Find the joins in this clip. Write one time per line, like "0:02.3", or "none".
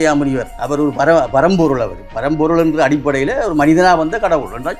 none